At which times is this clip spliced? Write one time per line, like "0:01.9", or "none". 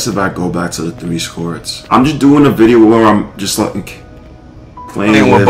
0:01.7